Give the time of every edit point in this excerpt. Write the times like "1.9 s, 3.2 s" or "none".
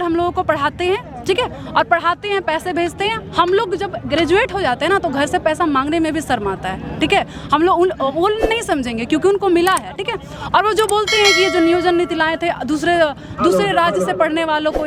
none